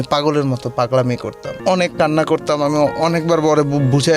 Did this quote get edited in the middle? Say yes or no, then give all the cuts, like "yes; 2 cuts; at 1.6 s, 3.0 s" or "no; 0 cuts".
yes; 1 cut; at 1.5 s